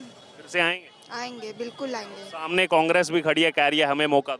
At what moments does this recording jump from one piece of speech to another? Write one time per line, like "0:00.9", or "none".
none